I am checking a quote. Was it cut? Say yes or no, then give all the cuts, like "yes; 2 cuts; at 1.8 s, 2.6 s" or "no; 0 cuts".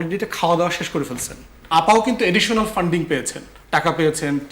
yes; 1 cut; at 1.6 s